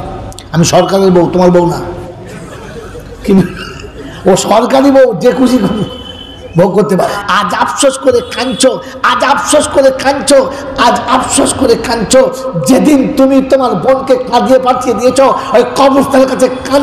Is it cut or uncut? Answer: cut